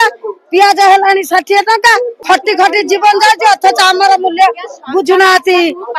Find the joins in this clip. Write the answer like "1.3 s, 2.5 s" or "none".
2.2 s

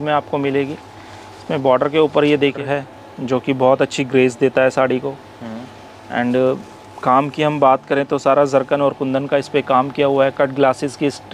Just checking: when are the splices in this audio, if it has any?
2.6 s

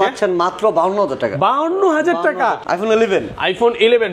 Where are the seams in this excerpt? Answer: 2.8 s

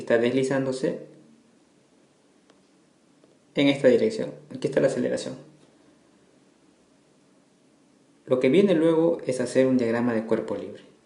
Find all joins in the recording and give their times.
9.9 s

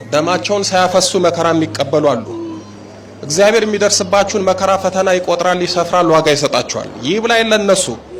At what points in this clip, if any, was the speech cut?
none

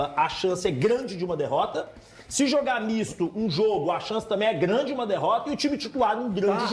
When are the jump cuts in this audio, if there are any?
none

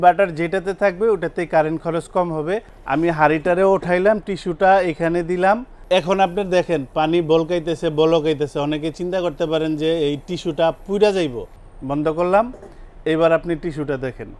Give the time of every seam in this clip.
2.7 s, 5.7 s, 11.4 s

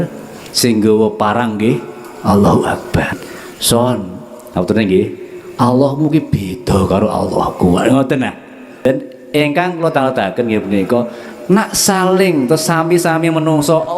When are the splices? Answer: 3.2 s, 8.8 s

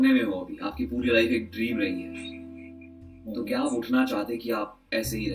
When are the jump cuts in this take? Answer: none

